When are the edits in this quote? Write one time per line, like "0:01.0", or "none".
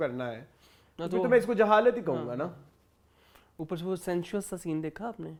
none